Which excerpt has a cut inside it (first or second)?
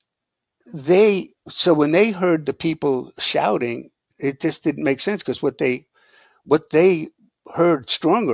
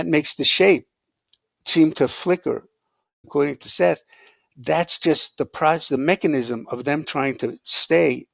second